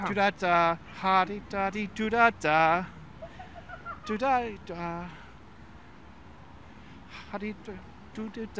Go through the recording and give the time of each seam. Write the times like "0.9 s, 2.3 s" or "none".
none